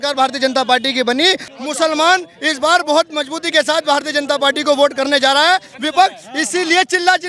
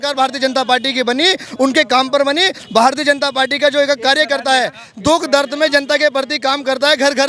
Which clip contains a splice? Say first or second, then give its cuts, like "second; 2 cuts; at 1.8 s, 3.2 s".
first; 1 cut; at 1.5 s